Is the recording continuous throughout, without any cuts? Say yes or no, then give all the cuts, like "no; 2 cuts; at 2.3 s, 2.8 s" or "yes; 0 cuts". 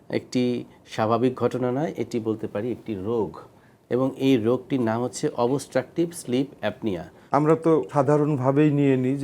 no; 1 cut; at 7.1 s